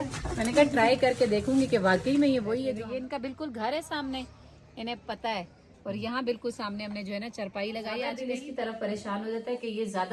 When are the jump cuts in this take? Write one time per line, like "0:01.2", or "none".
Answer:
0:02.7
0:08.2